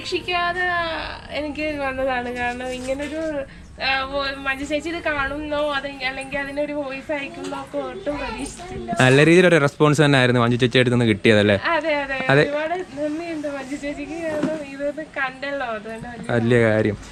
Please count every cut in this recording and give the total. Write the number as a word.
zero